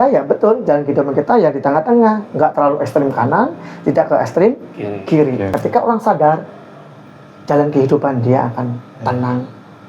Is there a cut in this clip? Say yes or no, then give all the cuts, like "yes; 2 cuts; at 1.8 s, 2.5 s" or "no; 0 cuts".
yes; 1 cut; at 5.5 s